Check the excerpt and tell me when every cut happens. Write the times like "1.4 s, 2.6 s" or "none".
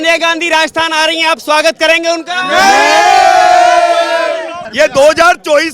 4.6 s